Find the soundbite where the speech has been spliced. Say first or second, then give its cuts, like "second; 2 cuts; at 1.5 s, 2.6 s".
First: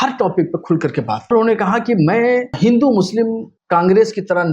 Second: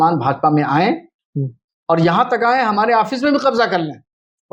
first; 3 cuts; at 1.3 s, 2.6 s, 3.5 s